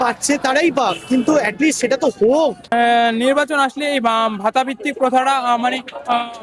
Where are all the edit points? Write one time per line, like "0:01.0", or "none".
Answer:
0:02.7